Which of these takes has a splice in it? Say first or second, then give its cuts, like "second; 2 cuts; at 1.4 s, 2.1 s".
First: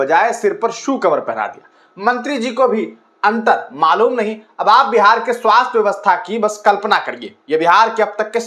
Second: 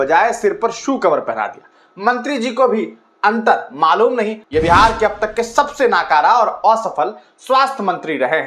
second; 1 cut; at 4.4 s